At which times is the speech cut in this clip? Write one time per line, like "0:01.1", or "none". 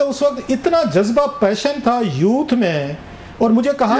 none